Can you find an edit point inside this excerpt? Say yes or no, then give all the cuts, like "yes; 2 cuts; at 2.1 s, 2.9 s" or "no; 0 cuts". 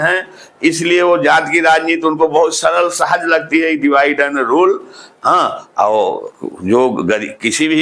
no; 0 cuts